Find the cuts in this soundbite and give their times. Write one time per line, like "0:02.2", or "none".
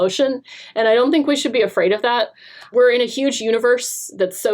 0:02.7